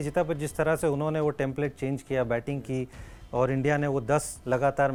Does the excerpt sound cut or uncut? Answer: uncut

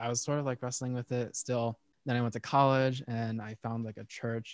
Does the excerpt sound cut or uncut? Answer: cut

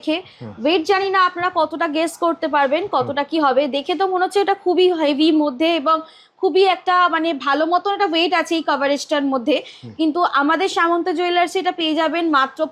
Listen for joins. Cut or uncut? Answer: uncut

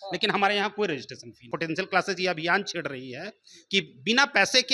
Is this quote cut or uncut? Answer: cut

